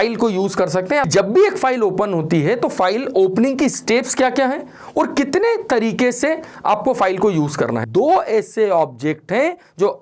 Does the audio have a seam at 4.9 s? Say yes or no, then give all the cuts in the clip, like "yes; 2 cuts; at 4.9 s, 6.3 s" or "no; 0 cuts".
no; 2 cuts; at 1.1 s, 7.8 s